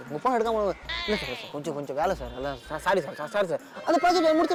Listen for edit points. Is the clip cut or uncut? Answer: uncut